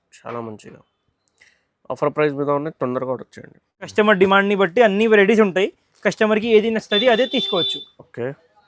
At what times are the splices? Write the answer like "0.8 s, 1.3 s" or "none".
3.9 s